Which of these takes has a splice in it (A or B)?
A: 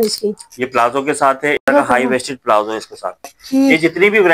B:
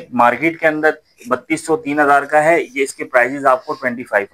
A